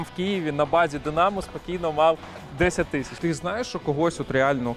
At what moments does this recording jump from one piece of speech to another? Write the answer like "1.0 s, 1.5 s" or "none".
3.1 s

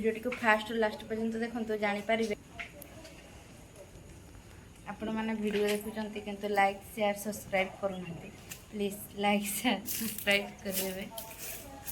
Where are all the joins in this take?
2.3 s

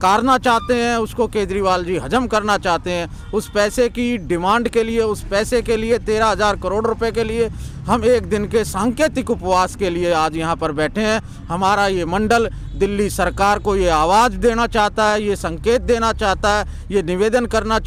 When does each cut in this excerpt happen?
none

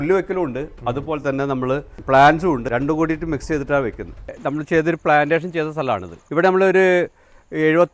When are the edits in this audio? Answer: 2.0 s, 2.7 s, 4.2 s, 6.2 s

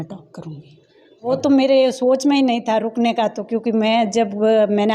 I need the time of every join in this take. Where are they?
1.3 s

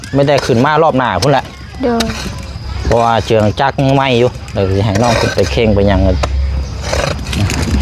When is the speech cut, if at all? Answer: none

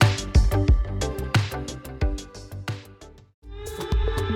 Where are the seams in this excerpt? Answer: 3.1 s

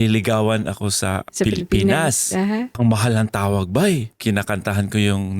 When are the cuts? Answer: 1.3 s, 2.7 s, 4.1 s

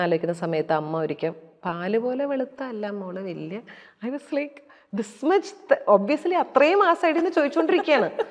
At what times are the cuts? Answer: none

